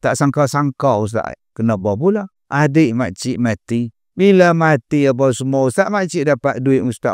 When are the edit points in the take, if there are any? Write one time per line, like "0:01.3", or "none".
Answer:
0:01.4
0:02.4
0:04.0